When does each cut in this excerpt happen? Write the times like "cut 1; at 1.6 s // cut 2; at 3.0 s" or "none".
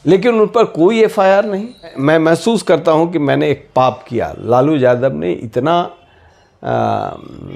cut 1; at 2.0 s